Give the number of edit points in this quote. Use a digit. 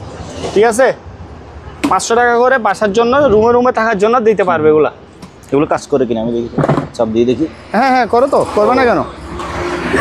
0